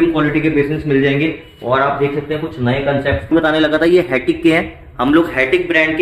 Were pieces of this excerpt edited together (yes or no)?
yes